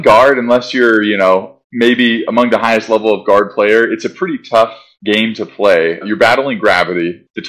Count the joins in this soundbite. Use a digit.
1